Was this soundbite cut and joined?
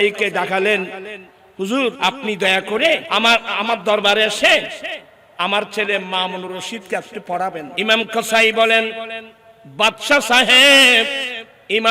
yes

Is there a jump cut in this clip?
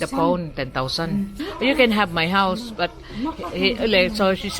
yes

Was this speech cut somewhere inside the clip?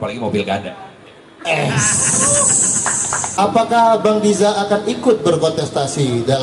yes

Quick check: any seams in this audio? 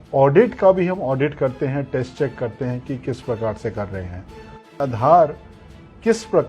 yes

